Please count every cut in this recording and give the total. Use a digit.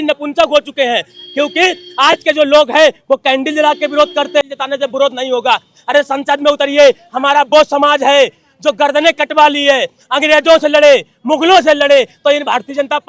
1